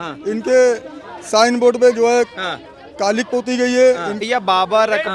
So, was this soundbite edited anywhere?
yes; 1 cut; at 4.2 s

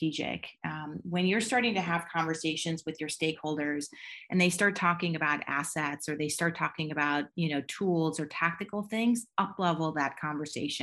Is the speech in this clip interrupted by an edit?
no; 0 cuts

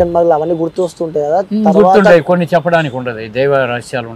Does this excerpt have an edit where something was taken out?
no; 0 cuts

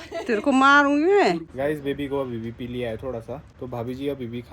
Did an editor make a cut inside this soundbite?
yes; 2 cuts; at 1.5 s, 3.5 s

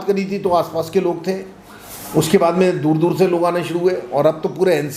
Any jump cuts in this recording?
no; 0 cuts

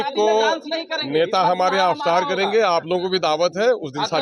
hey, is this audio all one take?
yes; 0 cuts

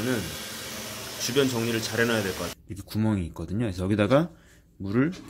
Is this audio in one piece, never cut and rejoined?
no; 1 cut; at 2.5 s

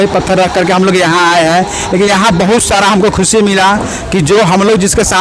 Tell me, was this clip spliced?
no; 0 cuts

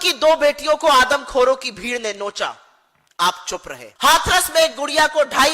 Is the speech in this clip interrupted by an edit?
yes; 1 cut; at 3.8 s

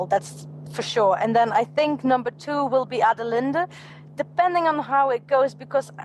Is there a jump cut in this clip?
no; 0 cuts

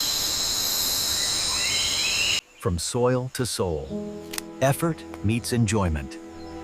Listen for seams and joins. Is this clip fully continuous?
no; 1 cut; at 2.4 s

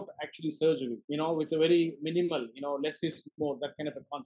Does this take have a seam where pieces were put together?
yes; 1 cut; at 1.0 s

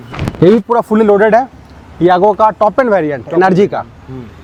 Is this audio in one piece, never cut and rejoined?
yes; 0 cuts

